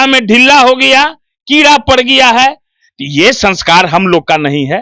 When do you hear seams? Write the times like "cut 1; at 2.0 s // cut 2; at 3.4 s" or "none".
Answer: none